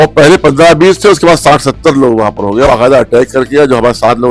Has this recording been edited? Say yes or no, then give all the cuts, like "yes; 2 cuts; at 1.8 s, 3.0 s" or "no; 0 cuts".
yes; 1 cut; at 2.7 s